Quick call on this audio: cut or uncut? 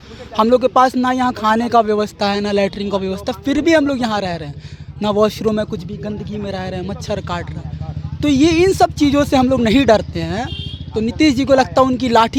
uncut